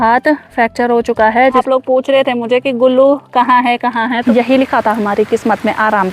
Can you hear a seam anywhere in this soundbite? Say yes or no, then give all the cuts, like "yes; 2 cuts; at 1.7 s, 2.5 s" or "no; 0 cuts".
yes; 2 cuts; at 1.6 s, 4.2 s